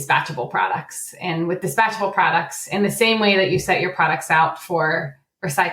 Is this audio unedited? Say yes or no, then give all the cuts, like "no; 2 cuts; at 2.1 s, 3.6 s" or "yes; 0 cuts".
yes; 0 cuts